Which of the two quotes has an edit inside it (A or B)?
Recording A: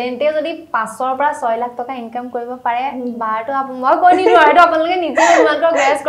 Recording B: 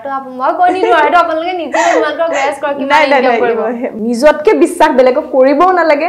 B